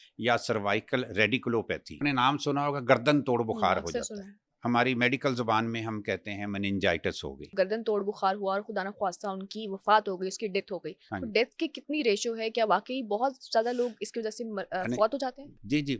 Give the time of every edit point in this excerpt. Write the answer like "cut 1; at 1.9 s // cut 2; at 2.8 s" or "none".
cut 1; at 2.0 s // cut 2; at 7.5 s